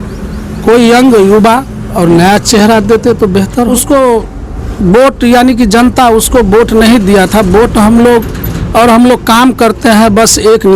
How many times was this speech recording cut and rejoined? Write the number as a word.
one